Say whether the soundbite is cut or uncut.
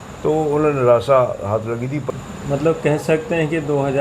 cut